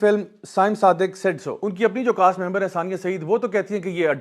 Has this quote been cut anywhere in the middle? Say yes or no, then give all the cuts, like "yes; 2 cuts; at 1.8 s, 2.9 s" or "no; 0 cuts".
yes; 1 cut; at 1.7 s